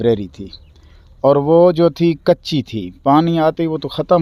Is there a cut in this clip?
no; 0 cuts

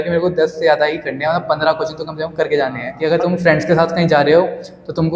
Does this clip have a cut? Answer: yes; 1 cut; at 2.9 s

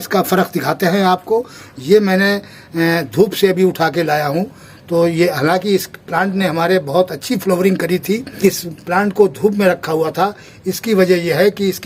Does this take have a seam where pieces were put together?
yes; 1 cut; at 8.4 s

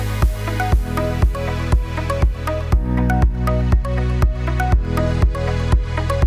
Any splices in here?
no; 0 cuts

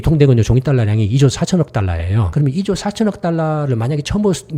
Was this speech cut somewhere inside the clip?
yes; 1 cut; at 2.3 s

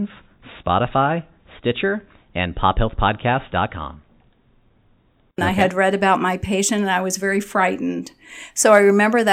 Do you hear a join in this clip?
yes; 1 cut; at 5.4 s

